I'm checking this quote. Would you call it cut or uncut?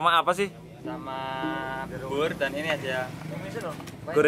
uncut